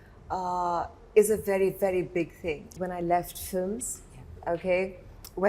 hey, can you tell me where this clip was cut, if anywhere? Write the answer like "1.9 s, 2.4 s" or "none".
2.7 s